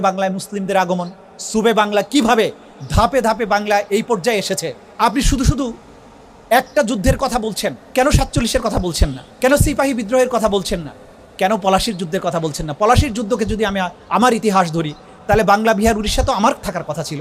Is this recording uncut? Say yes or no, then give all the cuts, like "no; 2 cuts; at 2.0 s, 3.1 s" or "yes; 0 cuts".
yes; 0 cuts